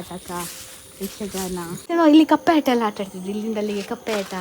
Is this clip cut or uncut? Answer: cut